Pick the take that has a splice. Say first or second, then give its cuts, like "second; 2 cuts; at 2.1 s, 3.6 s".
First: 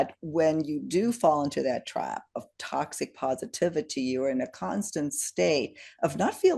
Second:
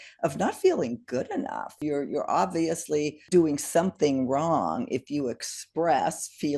second; 2 cuts; at 1.8 s, 3.2 s